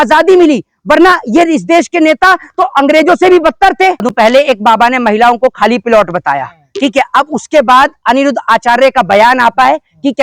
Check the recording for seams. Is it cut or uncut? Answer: cut